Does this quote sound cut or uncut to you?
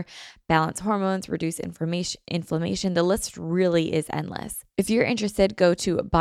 cut